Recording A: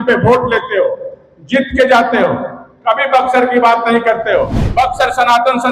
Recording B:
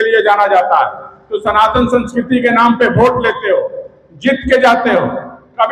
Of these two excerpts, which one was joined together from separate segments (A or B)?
A